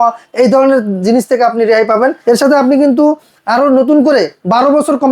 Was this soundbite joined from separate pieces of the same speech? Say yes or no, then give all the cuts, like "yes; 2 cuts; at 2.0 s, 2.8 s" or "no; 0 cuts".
yes; 1 cut; at 2.2 s